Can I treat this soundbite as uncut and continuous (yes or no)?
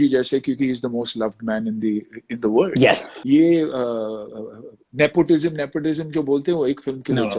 no